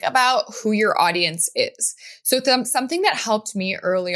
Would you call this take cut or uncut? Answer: uncut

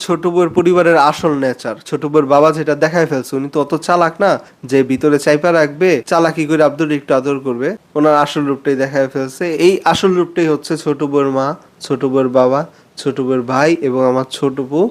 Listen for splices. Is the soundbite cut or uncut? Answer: uncut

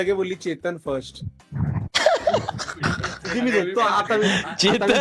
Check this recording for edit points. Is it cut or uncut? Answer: uncut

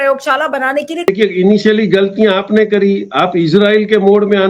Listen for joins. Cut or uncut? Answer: uncut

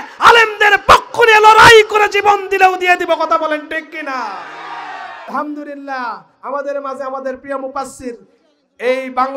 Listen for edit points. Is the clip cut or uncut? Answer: cut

